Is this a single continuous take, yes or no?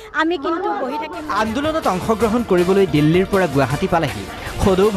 no